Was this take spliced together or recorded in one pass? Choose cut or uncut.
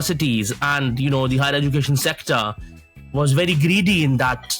uncut